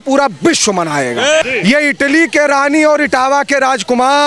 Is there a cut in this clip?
yes; 1 cut; at 1.4 s

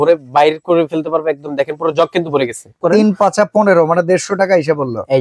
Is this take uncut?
no; 1 cut; at 2.8 s

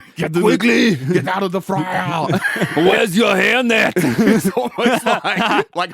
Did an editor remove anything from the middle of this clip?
yes; 1 cut; at 2.7 s

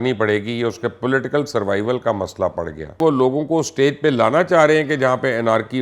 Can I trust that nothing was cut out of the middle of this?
no; 1 cut; at 3.0 s

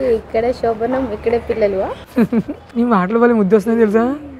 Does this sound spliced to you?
no; 0 cuts

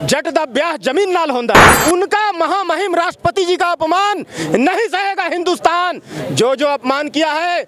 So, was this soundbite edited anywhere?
yes; 1 cut; at 1.8 s

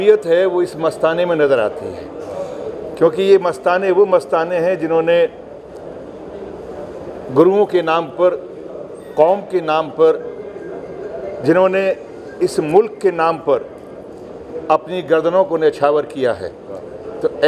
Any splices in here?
no; 0 cuts

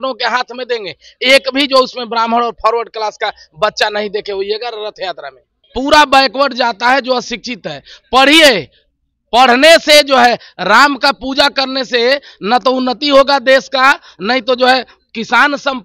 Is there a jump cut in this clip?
no; 0 cuts

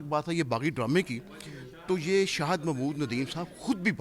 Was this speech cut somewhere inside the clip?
no; 0 cuts

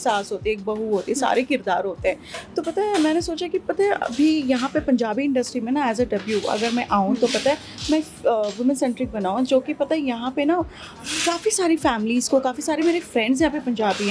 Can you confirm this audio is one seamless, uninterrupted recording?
yes; 0 cuts

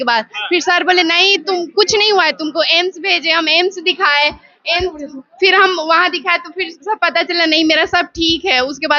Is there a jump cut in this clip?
no; 0 cuts

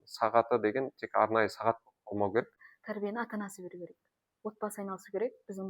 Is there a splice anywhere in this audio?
yes; 1 cut; at 2.5 s

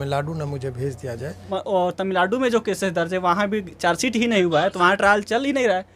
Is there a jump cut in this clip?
yes; 1 cut; at 1.5 s

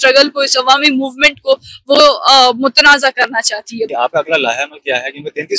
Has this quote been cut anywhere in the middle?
yes; 1 cut; at 3.9 s

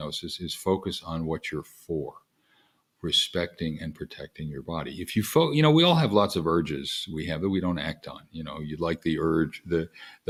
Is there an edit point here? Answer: no; 0 cuts

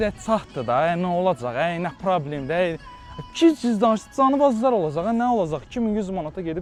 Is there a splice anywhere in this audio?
no; 0 cuts

